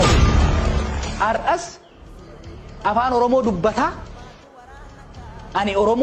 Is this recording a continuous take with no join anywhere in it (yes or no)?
yes